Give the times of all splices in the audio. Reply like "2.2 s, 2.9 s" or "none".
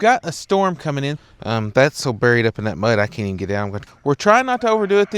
1.2 s, 3.8 s